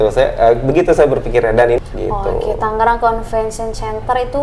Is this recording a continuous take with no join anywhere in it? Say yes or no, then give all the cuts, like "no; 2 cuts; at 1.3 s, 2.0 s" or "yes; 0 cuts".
no; 1 cut; at 1.8 s